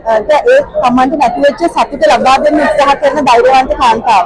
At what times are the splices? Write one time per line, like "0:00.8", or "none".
none